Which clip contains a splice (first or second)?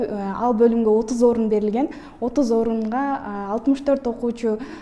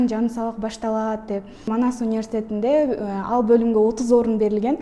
second